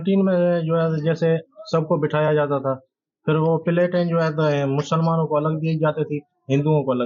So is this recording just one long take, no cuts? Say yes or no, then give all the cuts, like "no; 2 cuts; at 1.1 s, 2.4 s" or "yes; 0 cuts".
yes; 0 cuts